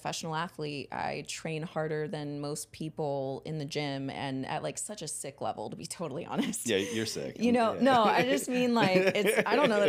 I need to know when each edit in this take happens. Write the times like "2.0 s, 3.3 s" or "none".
none